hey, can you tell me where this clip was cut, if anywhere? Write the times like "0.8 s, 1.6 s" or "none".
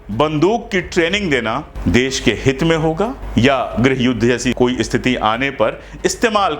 1.7 s, 3.2 s, 4.5 s